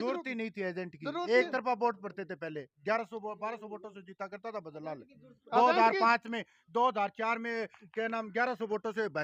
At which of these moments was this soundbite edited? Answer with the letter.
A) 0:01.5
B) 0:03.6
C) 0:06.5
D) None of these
D